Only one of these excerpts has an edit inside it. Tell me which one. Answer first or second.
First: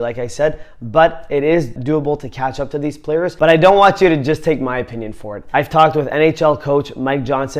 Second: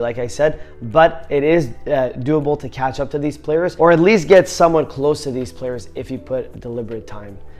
first